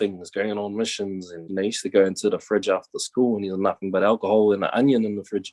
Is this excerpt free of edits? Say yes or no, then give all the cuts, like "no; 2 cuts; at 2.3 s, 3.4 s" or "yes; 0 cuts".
no; 1 cut; at 1.4 s